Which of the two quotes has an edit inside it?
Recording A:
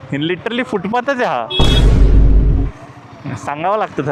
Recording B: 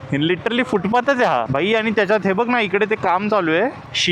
B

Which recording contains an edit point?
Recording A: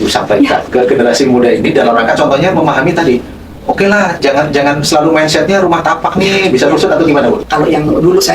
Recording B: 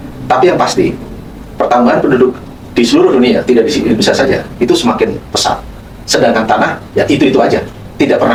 A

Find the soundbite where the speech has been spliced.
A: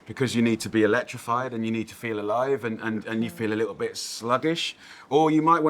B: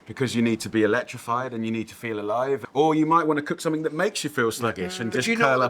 B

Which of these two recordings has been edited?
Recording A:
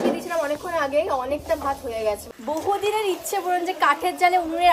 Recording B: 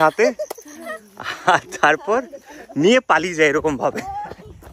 A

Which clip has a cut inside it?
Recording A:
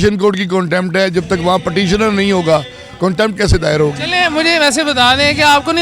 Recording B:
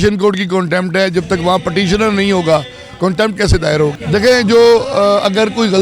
B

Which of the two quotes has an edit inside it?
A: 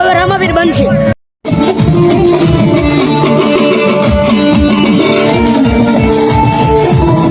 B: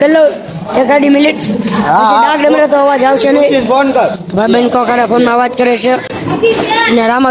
A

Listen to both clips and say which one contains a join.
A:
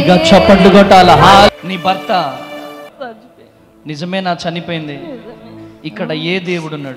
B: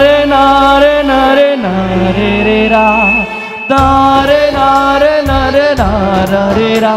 A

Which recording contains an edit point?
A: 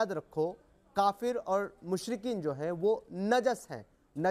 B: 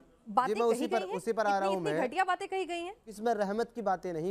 B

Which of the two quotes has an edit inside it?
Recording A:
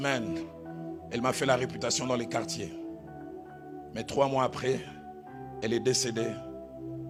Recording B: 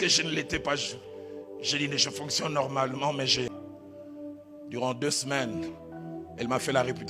B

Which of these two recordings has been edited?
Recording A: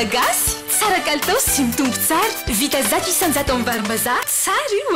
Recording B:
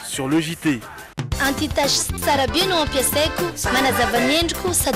B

